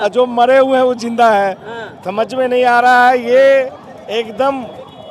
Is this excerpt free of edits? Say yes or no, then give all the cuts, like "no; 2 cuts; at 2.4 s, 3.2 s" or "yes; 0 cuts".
yes; 0 cuts